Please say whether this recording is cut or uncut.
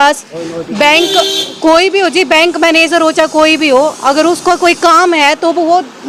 uncut